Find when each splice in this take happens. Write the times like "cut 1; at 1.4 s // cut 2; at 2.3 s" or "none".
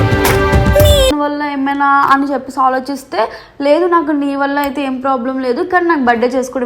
cut 1; at 1.2 s

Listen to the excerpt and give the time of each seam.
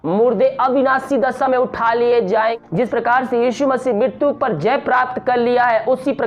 cut 1; at 2.5 s

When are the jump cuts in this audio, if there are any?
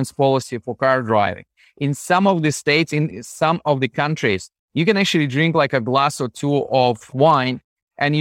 cut 1; at 7.1 s

